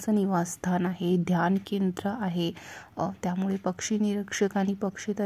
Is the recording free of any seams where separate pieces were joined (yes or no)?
yes